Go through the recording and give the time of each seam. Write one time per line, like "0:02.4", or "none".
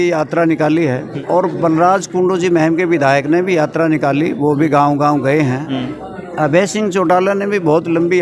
0:01.1
0:05.7